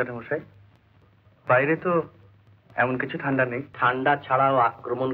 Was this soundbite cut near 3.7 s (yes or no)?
yes